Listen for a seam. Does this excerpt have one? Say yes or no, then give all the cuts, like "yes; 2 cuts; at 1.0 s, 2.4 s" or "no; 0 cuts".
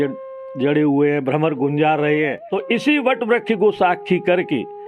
yes; 1 cut; at 2.5 s